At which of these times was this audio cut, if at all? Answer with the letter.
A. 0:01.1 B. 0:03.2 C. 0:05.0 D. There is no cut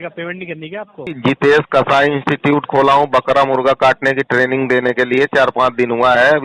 A